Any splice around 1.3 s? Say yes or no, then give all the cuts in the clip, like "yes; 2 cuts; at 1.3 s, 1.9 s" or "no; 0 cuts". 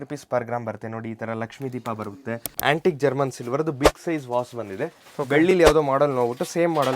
no; 1 cut; at 2.5 s